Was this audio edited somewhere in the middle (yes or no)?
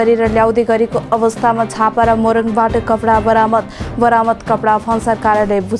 no